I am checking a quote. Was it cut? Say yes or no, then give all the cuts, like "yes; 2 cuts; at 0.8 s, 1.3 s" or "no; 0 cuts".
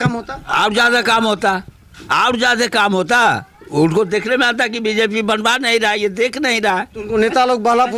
no; 0 cuts